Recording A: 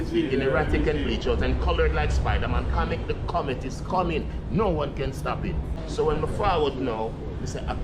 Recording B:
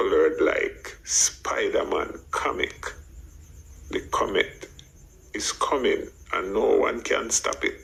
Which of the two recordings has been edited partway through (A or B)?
A